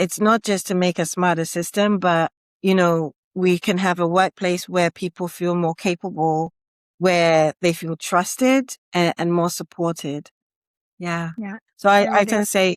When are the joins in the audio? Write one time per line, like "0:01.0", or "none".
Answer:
0:10.4